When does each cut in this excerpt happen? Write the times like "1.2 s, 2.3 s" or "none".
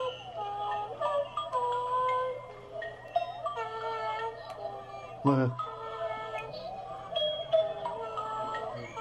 none